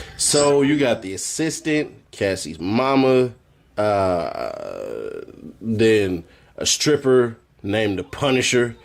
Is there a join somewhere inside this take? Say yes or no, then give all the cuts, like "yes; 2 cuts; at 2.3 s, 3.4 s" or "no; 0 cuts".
yes; 2 cuts; at 1.1 s, 5.9 s